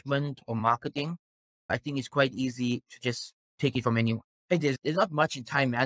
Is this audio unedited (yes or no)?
no